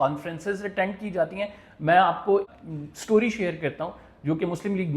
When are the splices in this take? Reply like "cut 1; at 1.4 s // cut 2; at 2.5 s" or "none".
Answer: cut 1; at 2.5 s